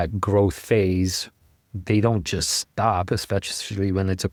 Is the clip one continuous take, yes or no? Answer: yes